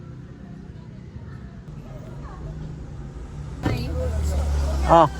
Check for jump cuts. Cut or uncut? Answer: cut